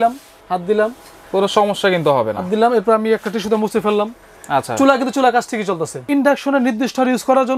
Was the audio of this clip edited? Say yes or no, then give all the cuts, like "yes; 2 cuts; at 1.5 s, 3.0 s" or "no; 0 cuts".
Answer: yes; 1 cut; at 6.0 s